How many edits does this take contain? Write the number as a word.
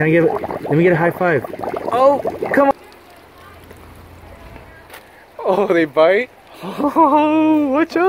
one